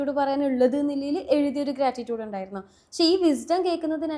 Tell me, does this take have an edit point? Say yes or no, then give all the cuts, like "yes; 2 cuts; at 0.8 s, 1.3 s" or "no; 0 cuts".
no; 0 cuts